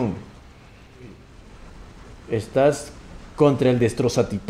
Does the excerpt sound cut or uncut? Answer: cut